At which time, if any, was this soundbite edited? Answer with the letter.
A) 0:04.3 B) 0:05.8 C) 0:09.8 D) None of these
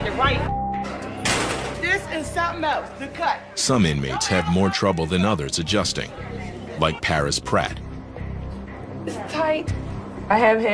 C